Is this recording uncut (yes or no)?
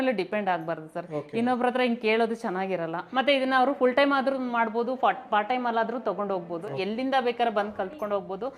no